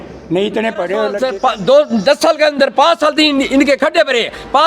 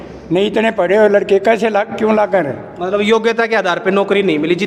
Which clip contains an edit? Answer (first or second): first